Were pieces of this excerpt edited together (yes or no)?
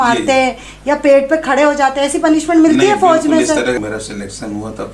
yes